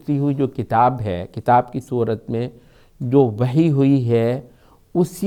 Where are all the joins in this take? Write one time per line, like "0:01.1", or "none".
none